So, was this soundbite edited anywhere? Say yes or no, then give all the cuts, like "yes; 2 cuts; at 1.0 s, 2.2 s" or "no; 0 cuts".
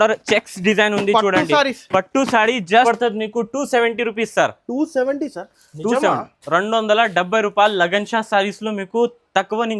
yes; 1 cut; at 2.8 s